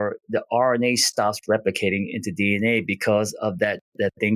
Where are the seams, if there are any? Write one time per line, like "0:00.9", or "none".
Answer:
none